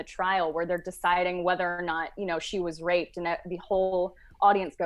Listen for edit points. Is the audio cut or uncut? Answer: uncut